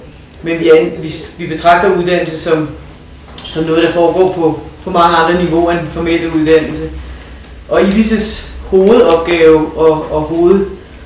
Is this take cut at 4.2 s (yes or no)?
yes